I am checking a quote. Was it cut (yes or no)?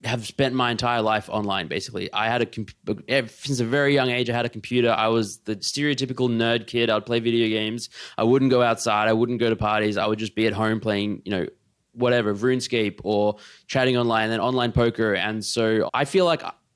yes